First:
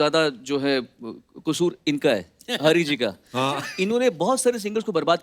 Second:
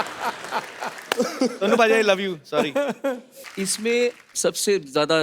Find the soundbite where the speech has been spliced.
second; 1 cut; at 3.3 s

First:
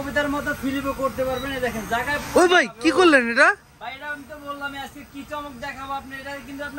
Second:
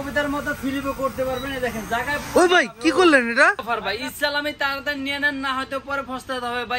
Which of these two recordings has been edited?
second; 1 cut; at 3.6 s

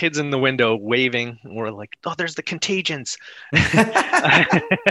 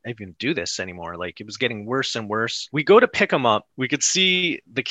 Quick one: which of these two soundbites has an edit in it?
second; 2 cuts; at 2.6 s, 3.7 s

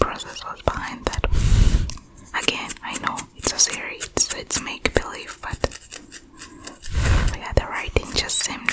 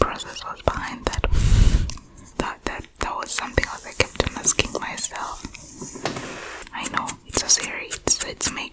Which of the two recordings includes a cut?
second; 2 cuts; at 2.2 s, 6.7 s

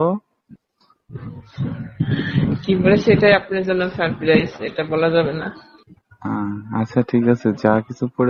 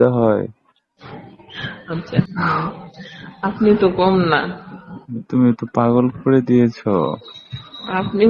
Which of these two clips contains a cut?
second; 1 cut; at 2.3 s

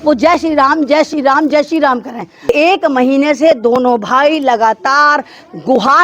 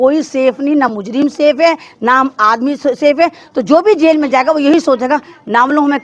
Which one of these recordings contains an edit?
first; 1 cut; at 2.5 s

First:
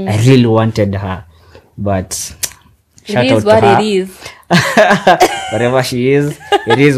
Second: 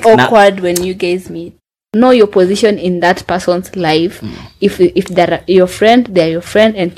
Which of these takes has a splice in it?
second; 1 cut; at 1.7 s

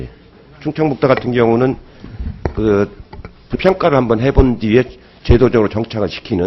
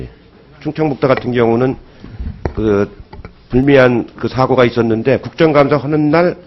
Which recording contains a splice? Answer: second; 1 cut; at 3.4 s

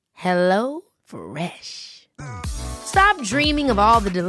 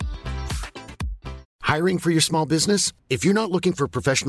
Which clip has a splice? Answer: second; 1 cut; at 1.5 s

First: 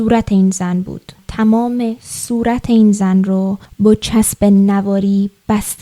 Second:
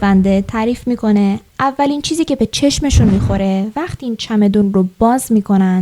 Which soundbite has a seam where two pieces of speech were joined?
first; 1 cut; at 1.1 s

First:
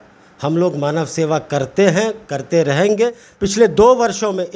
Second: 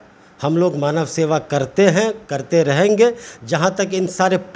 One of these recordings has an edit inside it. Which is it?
first; 1 cut; at 3.3 s

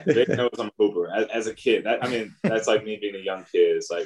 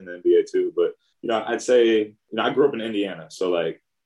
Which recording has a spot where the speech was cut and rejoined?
second; 2 cuts; at 1.1 s, 2.2 s

